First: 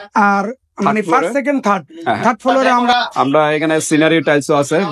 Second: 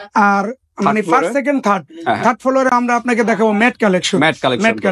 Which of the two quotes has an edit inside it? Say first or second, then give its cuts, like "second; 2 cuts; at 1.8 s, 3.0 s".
first; 1 cut; at 2.9 s